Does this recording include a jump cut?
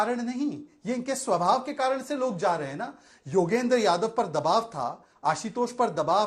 no; 0 cuts

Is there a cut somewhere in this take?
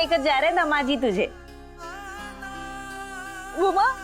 no; 0 cuts

